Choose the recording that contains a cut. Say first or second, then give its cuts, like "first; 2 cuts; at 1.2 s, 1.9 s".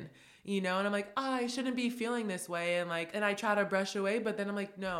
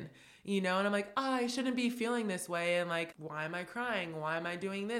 second; 1 cut; at 3.1 s